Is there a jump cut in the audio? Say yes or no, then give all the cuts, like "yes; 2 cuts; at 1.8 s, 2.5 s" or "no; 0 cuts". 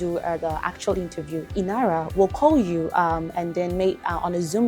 yes; 1 cut; at 1.9 s